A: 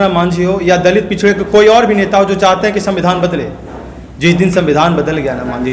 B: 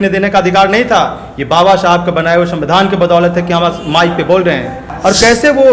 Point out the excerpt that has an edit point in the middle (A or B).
B